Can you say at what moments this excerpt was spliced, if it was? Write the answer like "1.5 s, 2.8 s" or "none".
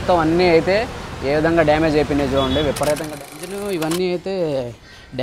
3.1 s